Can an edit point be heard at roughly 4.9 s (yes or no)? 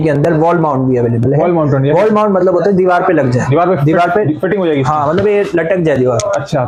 no